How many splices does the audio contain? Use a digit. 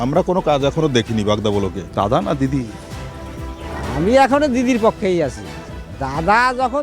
1